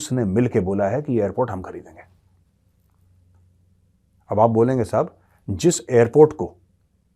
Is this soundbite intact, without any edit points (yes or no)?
yes